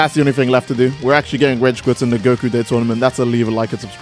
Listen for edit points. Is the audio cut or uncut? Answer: uncut